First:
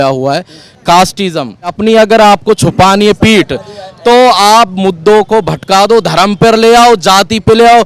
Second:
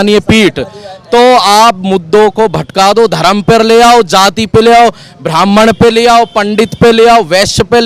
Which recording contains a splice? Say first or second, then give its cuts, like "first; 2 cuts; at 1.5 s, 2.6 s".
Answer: first; 1 cut; at 1.8 s